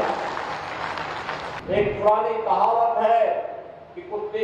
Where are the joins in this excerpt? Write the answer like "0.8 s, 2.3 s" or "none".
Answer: 1.5 s